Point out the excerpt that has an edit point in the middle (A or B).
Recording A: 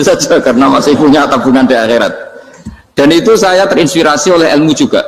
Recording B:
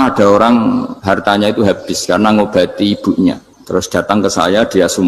B